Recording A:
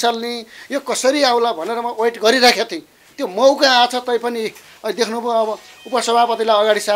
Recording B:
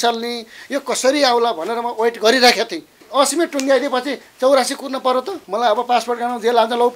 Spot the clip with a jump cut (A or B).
B